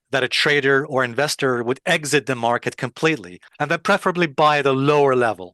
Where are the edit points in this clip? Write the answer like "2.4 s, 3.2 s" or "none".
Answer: 3.5 s